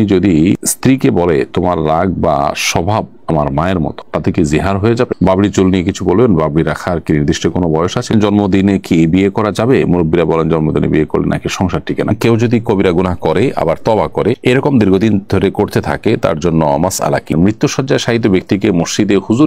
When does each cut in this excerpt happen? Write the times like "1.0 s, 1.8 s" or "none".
5.1 s, 8.1 s, 12.1 s, 17.3 s